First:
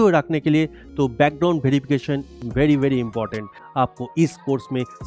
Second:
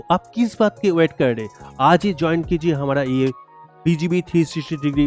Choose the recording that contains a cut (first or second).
first